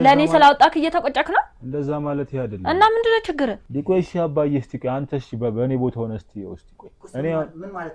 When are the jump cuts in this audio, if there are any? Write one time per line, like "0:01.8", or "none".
0:03.6

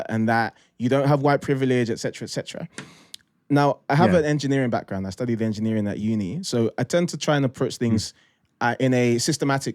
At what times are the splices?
none

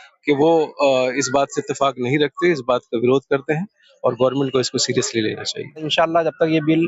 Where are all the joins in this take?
0:05.8

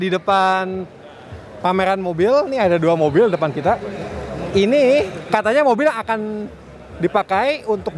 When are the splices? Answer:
none

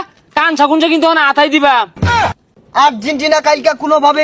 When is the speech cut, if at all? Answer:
0:02.3

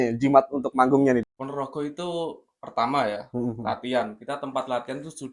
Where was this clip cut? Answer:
0:01.3

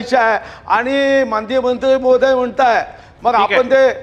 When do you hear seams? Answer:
none

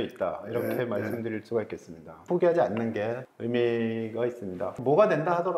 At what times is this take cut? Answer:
0:02.2

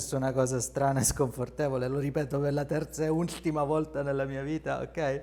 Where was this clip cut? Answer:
none

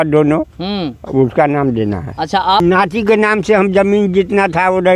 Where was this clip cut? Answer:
0:02.6

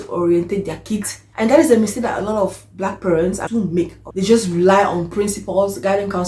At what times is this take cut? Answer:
0:01.2
0:03.5

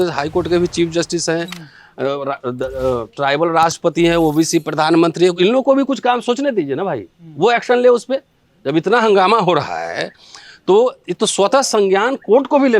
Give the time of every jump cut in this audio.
none

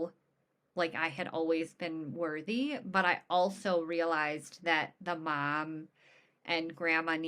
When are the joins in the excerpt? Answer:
none

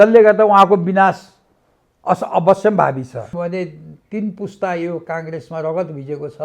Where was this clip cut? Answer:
0:03.3

